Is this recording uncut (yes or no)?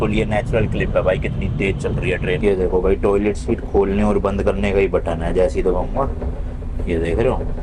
no